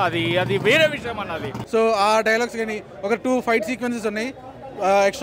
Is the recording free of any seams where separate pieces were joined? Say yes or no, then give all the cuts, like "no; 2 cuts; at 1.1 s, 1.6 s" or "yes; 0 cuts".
no; 1 cut; at 1.5 s